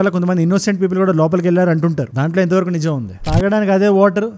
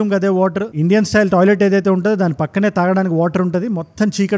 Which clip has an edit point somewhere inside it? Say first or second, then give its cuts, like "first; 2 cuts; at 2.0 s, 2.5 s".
first; 1 cut; at 3.2 s